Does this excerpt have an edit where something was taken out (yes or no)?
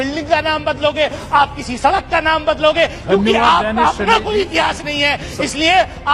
no